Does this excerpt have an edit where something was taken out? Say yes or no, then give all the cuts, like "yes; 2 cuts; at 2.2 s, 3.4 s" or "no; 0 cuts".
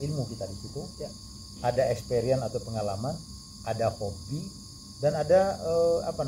no; 0 cuts